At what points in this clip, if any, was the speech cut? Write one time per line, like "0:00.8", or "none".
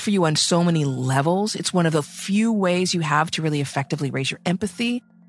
none